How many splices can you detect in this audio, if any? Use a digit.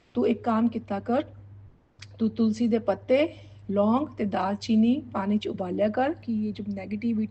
1